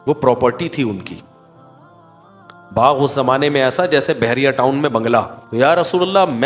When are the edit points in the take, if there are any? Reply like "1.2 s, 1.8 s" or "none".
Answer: 5.4 s